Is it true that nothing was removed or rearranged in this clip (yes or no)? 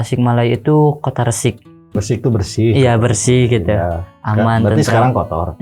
no